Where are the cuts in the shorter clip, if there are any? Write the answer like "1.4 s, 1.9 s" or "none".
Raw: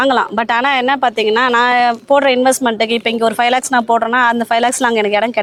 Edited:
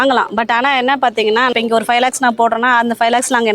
1.5 s